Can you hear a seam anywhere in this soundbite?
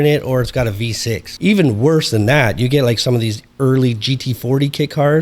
yes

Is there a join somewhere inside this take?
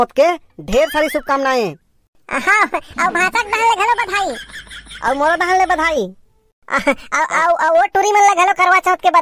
no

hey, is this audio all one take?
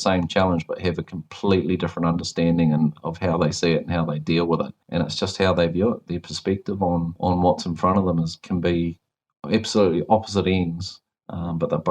yes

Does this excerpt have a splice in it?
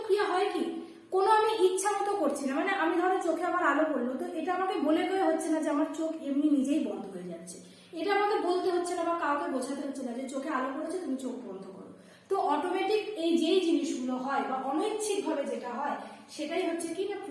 no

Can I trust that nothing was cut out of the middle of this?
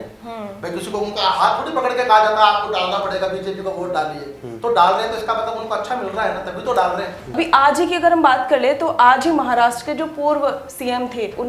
no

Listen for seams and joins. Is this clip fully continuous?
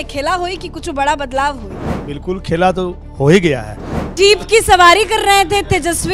no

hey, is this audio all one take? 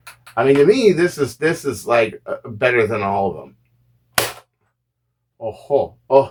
yes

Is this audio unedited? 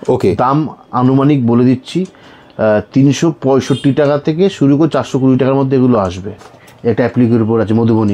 no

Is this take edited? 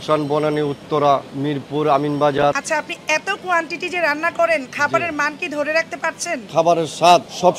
no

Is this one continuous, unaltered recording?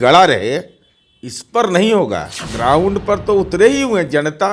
no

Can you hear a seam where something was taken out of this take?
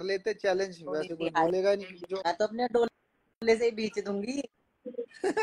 yes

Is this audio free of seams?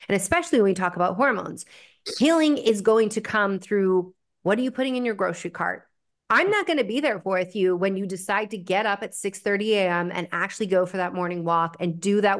yes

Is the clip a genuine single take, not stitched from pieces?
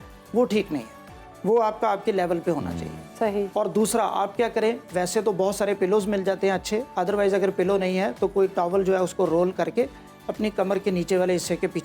yes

